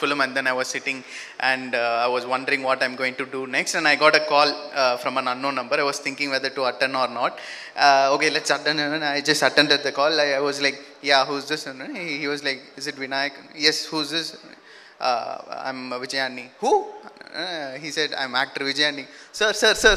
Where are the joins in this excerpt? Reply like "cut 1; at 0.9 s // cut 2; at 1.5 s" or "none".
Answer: none